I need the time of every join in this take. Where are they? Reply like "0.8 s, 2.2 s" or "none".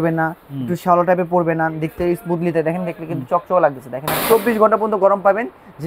4.2 s